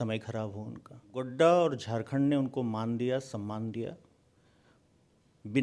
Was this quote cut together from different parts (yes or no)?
yes